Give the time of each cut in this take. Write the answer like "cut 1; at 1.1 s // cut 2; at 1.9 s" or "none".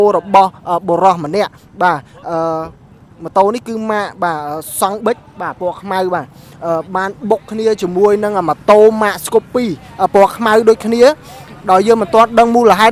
none